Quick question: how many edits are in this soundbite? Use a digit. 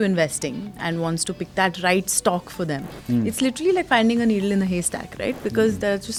0